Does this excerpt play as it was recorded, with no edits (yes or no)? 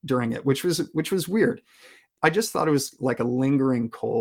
no